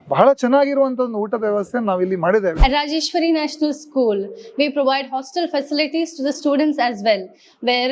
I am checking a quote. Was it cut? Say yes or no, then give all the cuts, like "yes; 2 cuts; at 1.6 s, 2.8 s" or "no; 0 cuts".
yes; 1 cut; at 2.6 s